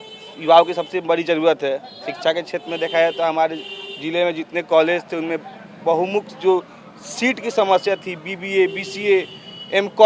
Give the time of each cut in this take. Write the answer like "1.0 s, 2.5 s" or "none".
none